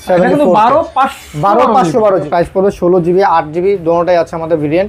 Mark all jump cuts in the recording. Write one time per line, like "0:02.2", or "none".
0:02.3